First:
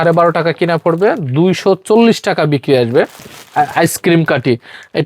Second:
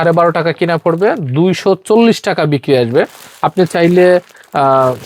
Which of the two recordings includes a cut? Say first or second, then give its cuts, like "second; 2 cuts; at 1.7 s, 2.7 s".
first; 1 cut; at 3.3 s